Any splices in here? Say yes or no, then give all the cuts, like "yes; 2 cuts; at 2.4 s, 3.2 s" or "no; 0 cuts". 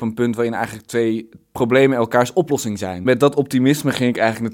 yes; 2 cuts; at 1.5 s, 3.0 s